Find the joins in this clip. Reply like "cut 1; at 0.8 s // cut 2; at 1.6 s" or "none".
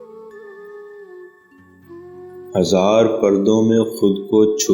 cut 1; at 1.0 s // cut 2; at 2.5 s